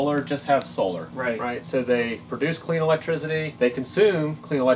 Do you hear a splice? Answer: yes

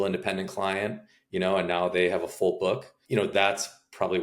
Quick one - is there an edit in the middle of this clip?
no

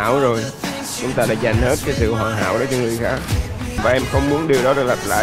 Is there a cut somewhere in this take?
yes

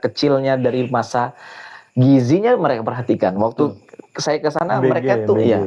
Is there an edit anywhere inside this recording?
no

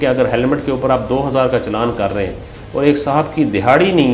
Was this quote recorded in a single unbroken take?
yes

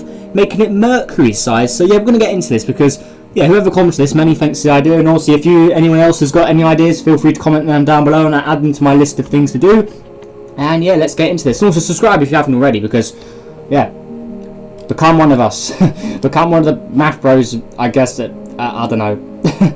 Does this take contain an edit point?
yes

